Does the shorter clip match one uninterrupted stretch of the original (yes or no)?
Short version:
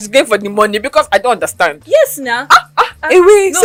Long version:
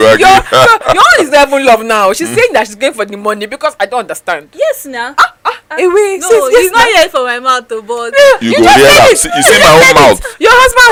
yes